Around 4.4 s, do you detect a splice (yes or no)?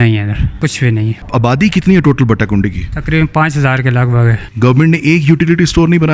yes